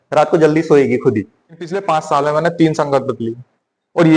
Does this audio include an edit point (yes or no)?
yes